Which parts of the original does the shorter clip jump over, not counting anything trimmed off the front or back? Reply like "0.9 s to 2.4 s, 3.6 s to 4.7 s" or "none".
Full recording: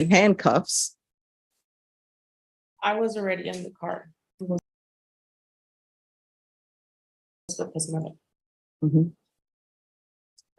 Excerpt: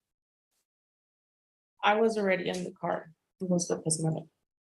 4.6 s to 7.5 s